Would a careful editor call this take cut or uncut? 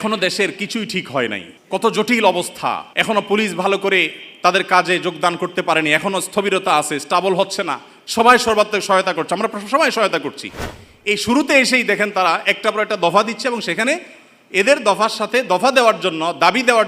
cut